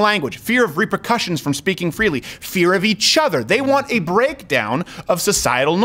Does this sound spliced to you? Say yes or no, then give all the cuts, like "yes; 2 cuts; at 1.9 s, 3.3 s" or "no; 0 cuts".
no; 0 cuts